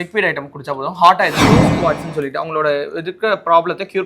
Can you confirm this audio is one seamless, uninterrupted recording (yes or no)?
no